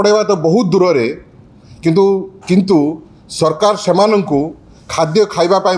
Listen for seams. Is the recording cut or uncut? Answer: uncut